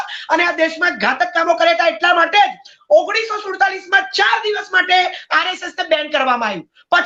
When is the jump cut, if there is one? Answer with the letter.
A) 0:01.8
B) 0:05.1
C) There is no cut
C